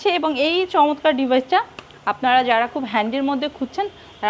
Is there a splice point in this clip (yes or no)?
no